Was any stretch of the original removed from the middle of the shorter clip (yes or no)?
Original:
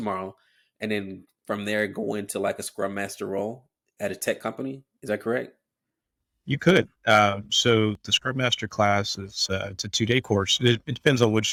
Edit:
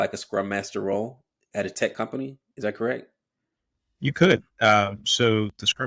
no